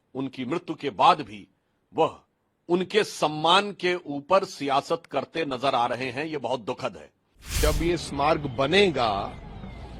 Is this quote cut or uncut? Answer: cut